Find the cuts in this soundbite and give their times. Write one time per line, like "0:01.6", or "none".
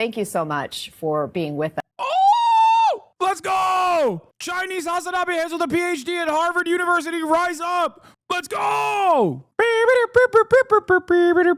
0:04.3
0:08.0